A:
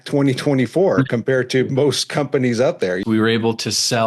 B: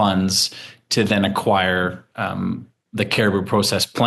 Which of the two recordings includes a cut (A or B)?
A